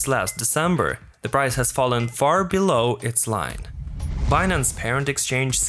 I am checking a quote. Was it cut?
yes; 1 cut; at 3.9 s

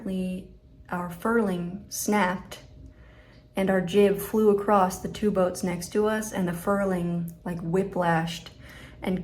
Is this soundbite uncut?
no; 1 cut; at 1.8 s

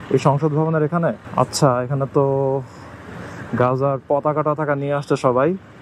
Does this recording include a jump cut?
yes; 1 cut; at 1.2 s

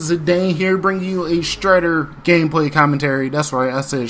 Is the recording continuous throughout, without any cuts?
no; 1 cut; at 2.2 s

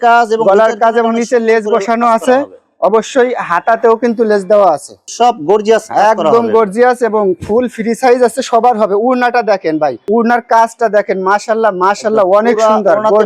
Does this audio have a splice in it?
no; 0 cuts

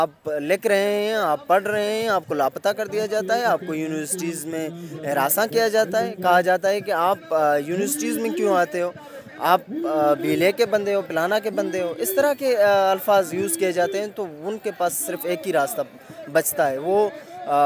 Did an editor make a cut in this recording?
no; 0 cuts

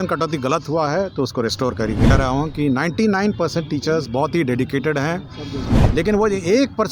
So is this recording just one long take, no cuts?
no; 2 cuts; at 2.1 s, 5.6 s

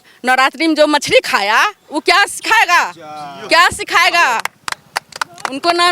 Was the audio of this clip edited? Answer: no; 0 cuts

